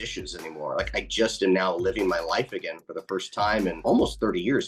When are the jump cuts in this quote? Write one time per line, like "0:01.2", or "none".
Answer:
0:03.8

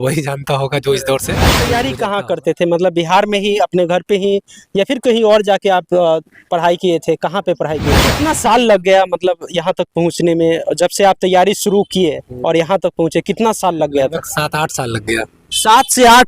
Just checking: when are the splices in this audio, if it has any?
0:01.7
0:08.0

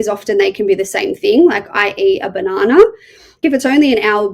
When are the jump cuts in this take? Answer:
0:03.4

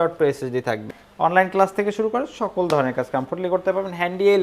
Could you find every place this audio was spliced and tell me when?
0:01.0

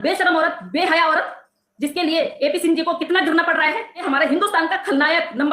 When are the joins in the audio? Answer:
0:04.0

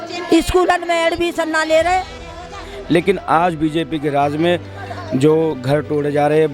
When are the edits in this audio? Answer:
0:02.7

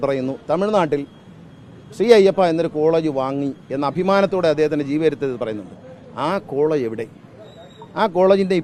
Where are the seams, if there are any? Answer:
none

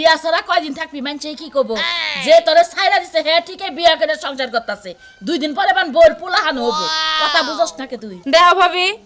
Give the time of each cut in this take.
none

